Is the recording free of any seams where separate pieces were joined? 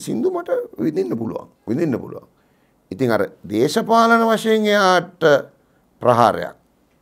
no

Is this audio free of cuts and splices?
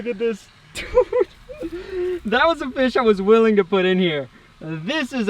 yes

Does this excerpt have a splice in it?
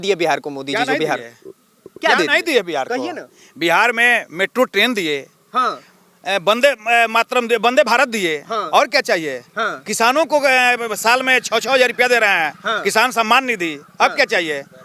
no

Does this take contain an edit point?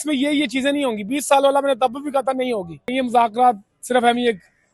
yes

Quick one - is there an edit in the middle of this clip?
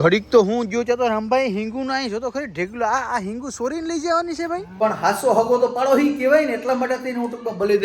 yes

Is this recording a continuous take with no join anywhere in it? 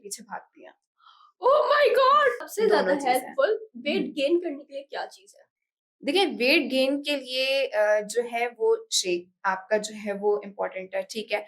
no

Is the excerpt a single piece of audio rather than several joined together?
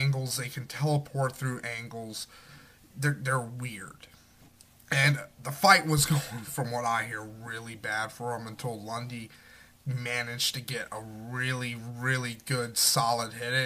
no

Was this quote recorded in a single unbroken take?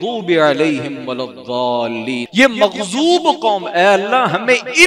no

